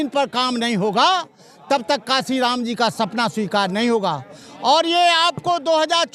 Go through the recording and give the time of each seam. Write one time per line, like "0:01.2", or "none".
none

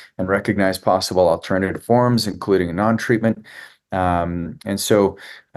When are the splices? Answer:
none

